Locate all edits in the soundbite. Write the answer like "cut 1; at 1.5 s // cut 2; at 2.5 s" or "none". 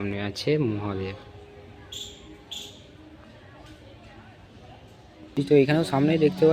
cut 1; at 5.4 s